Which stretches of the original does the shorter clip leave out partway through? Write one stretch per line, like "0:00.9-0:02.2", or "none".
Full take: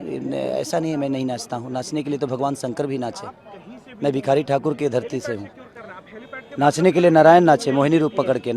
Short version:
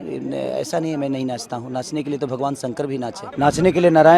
0:03.2-0:06.4